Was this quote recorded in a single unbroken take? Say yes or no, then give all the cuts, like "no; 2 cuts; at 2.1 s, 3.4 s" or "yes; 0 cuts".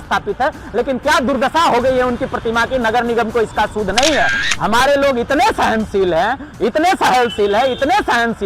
no; 1 cut; at 4.4 s